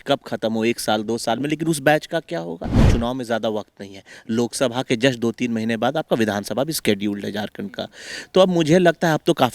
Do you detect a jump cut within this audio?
yes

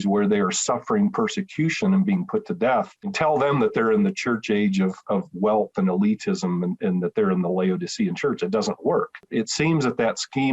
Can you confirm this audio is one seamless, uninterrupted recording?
no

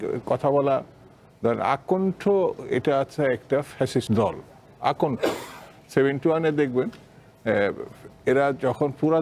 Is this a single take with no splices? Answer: no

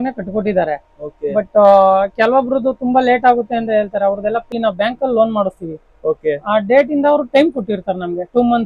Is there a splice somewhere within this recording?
yes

